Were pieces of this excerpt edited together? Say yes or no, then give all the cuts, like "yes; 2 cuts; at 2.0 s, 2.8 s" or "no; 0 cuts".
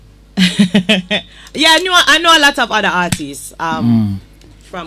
no; 0 cuts